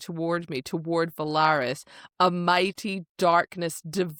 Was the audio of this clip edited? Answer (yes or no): no